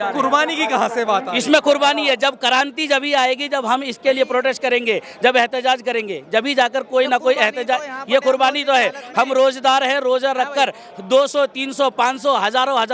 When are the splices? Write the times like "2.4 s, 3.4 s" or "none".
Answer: none